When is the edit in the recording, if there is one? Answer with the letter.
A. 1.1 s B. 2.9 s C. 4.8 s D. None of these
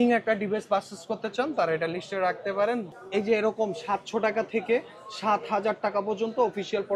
B